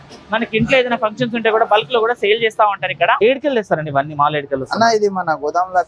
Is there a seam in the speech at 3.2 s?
yes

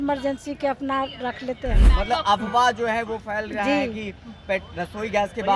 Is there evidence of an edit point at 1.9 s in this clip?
yes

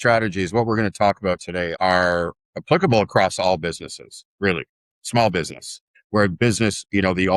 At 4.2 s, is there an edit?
no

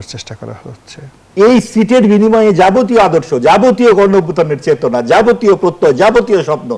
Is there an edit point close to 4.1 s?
no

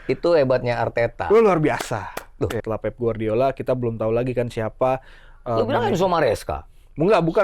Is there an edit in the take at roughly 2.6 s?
yes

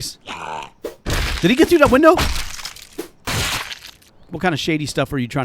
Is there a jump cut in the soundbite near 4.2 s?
yes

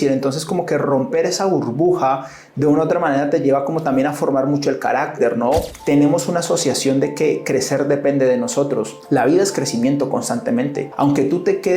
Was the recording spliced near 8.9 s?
yes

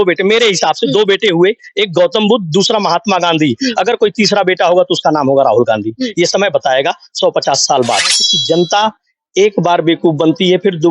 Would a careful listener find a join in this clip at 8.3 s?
yes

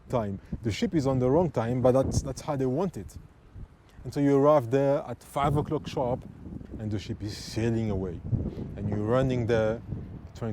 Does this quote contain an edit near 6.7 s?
yes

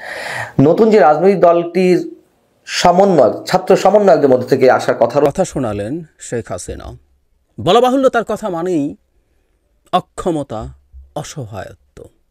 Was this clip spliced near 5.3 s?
yes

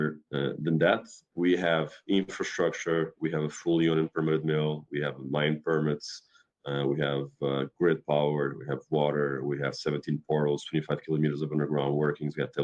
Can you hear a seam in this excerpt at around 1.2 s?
yes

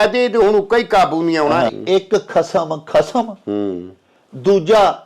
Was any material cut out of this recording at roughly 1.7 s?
yes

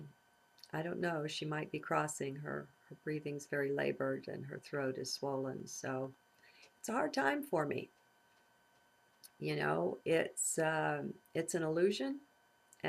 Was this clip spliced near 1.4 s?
no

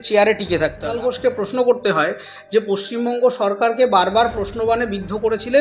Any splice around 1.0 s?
yes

